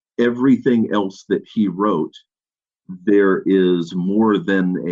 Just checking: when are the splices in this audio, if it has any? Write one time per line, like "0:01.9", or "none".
none